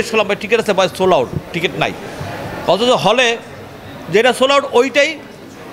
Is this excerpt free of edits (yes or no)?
yes